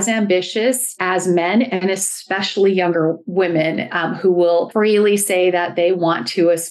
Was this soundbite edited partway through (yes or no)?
yes